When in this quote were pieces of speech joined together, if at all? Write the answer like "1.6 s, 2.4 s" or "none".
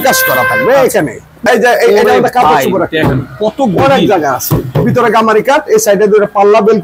1.4 s